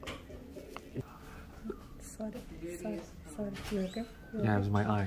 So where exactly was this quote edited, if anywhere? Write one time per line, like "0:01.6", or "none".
0:01.0